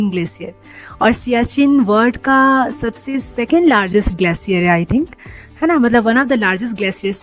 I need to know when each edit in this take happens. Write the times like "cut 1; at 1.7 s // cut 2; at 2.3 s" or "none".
none